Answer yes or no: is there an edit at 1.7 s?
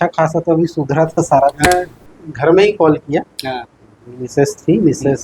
yes